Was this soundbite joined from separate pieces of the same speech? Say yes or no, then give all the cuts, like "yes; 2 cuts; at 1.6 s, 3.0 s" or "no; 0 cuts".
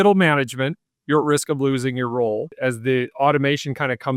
yes; 1 cut; at 2.6 s